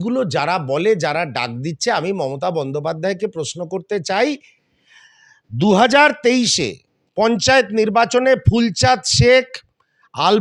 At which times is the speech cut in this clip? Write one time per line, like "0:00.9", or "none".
none